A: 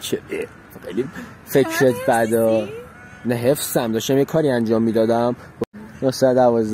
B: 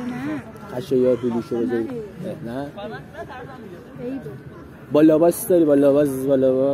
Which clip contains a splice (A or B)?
A